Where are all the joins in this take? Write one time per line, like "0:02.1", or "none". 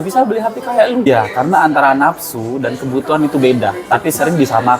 0:01.1